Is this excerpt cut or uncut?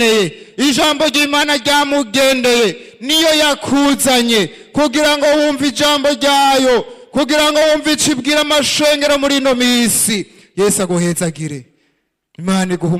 uncut